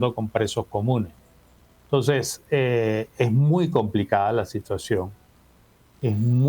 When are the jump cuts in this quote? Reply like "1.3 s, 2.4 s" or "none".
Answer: none